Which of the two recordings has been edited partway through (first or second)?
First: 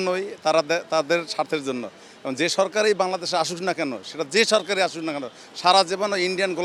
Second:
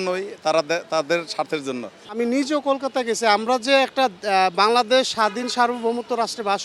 second